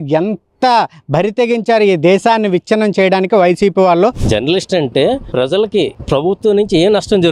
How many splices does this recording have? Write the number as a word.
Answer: one